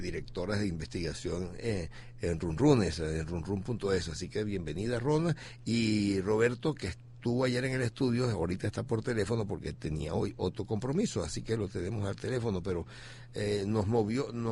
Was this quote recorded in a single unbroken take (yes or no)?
no